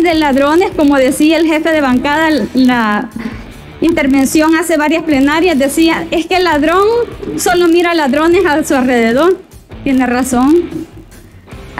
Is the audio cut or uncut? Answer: uncut